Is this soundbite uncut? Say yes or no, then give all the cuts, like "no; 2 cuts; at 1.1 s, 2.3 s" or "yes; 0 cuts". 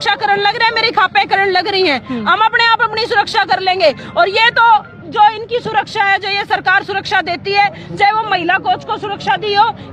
yes; 0 cuts